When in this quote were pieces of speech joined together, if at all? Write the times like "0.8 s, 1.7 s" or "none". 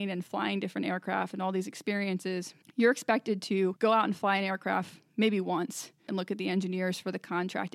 2.6 s, 3.8 s, 6.1 s

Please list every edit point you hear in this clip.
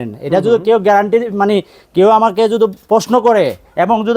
none

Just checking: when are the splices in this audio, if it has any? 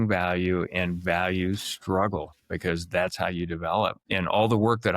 4.0 s

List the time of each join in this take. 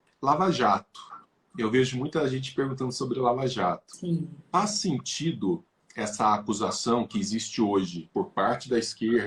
3.9 s, 8.0 s

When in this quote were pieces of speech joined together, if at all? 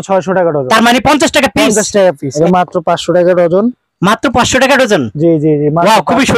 2.3 s

